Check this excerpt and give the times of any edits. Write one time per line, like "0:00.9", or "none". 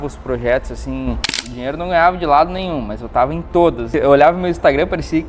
0:01.4
0:03.8

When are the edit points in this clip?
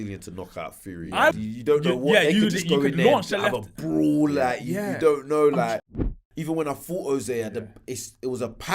0:01.3
0:06.1

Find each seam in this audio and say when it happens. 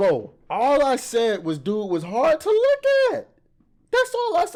none

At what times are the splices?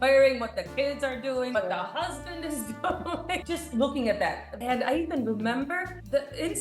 0:01.6
0:03.4
0:04.5

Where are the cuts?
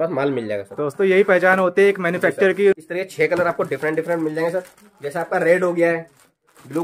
none

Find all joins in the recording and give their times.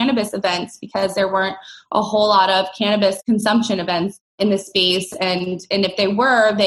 0:03.2
0:04.2

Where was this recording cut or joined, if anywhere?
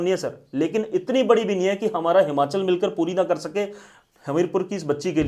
none

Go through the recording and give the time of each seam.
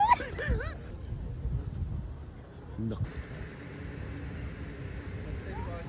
0:00.9
0:03.1

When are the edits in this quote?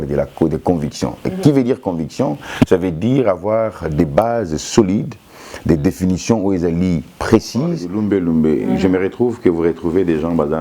0:07.8

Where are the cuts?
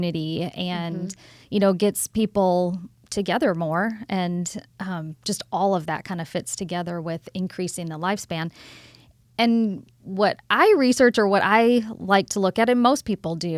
none

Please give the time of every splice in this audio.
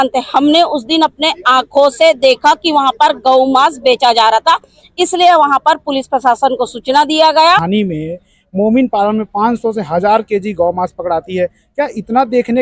0:07.6

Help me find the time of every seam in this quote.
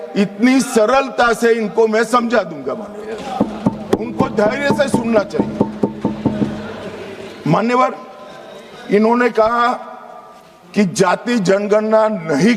none

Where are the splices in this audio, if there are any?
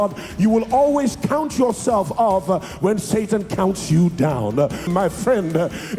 0:04.9

